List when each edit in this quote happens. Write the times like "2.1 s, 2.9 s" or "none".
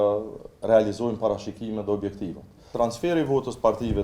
2.7 s